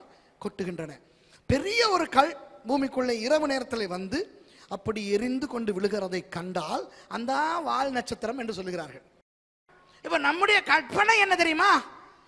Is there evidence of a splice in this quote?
yes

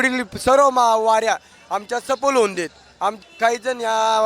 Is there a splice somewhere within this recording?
yes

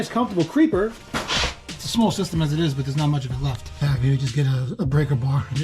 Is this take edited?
yes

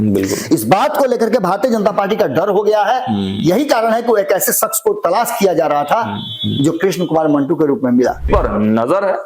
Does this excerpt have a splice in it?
yes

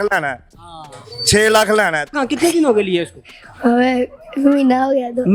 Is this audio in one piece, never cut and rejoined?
no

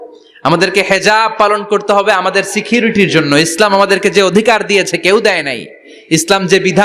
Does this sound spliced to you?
no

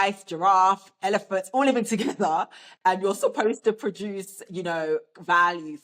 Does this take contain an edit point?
no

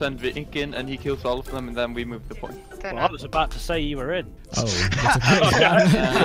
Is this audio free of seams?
no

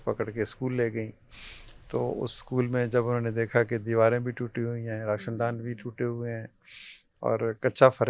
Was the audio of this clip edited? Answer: no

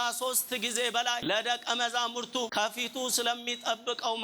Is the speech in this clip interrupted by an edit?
yes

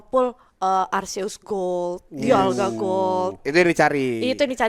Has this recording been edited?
no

